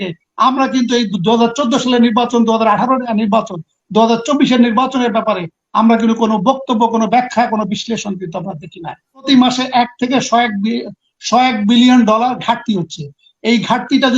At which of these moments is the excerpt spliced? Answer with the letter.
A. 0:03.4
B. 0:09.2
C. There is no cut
B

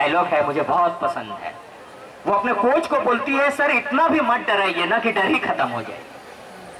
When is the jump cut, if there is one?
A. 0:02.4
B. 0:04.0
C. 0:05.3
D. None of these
D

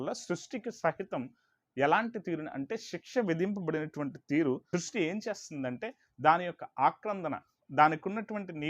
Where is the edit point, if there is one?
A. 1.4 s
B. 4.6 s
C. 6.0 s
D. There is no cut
B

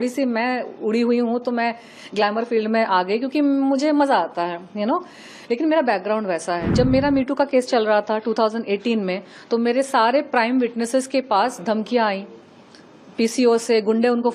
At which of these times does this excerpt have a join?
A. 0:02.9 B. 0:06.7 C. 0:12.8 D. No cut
B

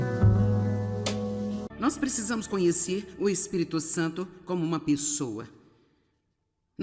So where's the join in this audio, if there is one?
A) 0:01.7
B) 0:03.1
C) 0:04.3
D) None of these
A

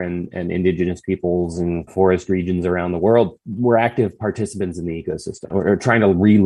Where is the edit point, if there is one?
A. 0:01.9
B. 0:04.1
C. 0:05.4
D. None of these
C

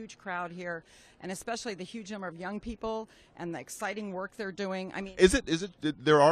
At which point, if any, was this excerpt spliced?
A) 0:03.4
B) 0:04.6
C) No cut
A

